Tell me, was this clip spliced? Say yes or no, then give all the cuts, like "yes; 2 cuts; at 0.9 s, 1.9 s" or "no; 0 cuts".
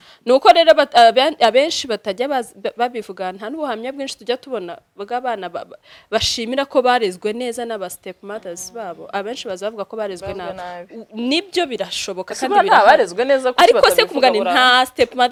no; 0 cuts